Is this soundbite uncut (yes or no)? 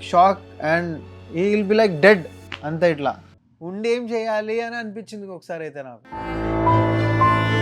no